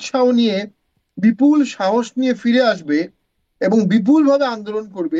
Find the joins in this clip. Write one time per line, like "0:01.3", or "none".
none